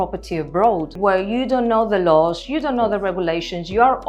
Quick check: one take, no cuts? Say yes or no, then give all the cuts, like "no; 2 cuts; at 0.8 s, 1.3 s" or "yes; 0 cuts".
no; 1 cut; at 1.0 s